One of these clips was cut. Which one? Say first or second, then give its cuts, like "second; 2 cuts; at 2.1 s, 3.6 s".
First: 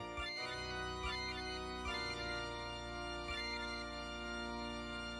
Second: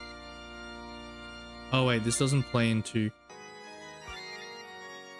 second; 1 cut; at 3.3 s